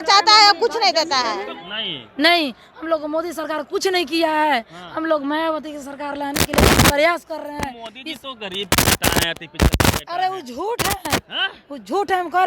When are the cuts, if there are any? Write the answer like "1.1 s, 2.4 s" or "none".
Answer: 1.5 s